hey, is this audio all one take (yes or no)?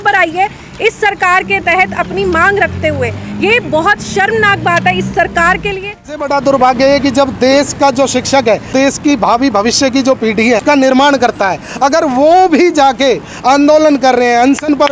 no